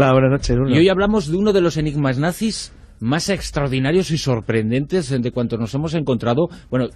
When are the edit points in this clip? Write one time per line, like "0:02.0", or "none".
0:06.0